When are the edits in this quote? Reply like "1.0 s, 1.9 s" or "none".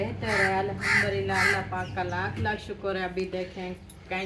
none